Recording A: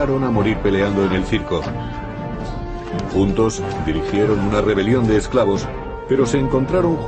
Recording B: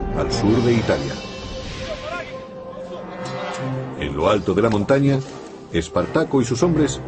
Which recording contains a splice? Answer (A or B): A